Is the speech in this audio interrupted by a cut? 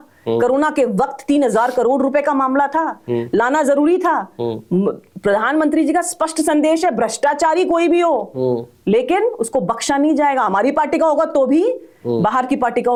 no; 0 cuts

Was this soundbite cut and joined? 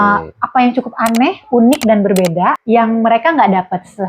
yes; 1 cut; at 2.6 s

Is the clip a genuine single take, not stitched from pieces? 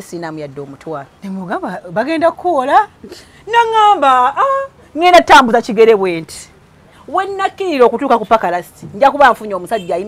no; 1 cut; at 1.1 s

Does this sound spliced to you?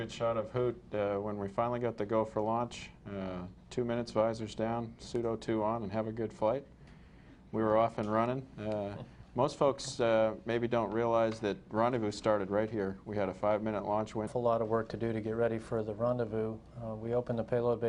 no; 0 cuts

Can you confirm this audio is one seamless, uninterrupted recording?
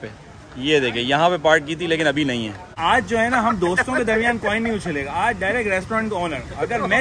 no; 1 cut; at 2.7 s

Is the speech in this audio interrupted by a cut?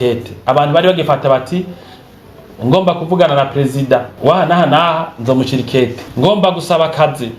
yes; 2 cuts; at 4.1 s, 6.1 s

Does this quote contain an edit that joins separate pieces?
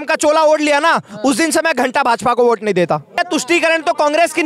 yes; 1 cut; at 3.2 s

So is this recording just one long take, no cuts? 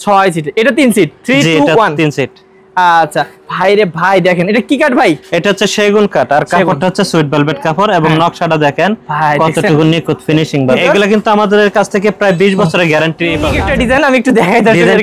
no; 2 cuts; at 10.7 s, 13.5 s

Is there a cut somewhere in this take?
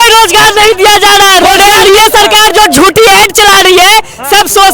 yes; 1 cut; at 1.5 s

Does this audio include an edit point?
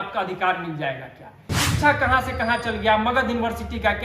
yes; 1 cut; at 1.7 s

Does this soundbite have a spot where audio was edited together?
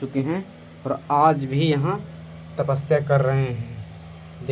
no; 0 cuts

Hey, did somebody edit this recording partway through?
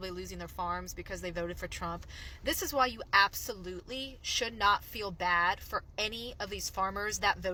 no; 0 cuts

